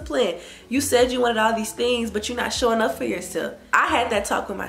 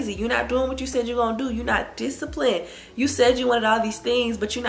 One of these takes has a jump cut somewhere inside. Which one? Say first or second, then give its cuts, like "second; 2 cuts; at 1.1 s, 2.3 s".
first; 1 cut; at 3.6 s